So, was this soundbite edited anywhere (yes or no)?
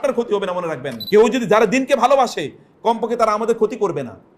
yes